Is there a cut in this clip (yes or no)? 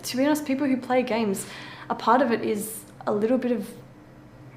no